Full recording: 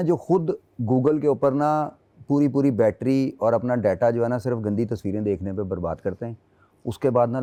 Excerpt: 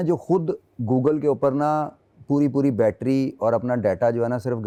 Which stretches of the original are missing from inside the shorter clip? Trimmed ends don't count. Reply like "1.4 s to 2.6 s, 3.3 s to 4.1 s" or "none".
none